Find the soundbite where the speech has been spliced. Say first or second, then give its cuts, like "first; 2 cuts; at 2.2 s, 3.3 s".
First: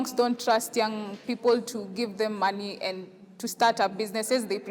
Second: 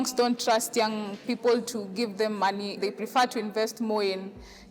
second; 1 cut; at 2.8 s